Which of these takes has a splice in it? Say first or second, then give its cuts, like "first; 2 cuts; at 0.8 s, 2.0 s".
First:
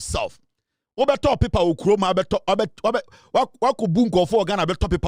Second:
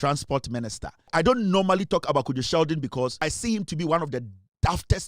second; 2 cuts; at 1.1 s, 3.2 s